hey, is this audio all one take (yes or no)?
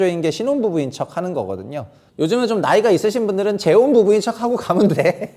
yes